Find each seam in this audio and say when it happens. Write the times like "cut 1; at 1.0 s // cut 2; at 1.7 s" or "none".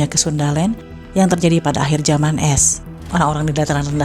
cut 1; at 3.0 s

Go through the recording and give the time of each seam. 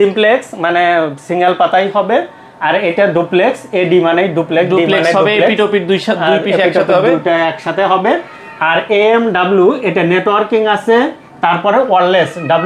none

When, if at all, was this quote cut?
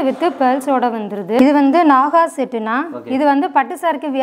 cut 1; at 1.4 s

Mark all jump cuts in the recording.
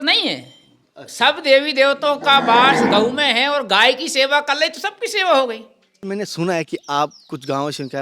cut 1; at 6.1 s

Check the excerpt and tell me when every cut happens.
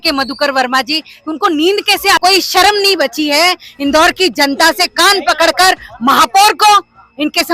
cut 1; at 2.2 s

